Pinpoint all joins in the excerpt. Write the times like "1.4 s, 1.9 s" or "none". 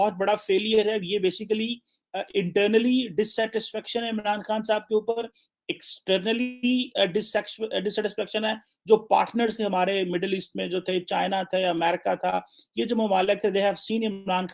none